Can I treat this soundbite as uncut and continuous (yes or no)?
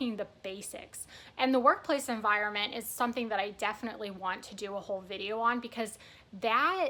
yes